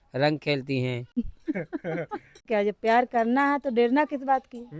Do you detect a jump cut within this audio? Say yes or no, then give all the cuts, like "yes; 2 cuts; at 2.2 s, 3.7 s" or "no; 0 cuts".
yes; 2 cuts; at 1.2 s, 2.5 s